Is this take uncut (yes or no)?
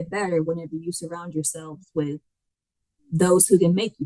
yes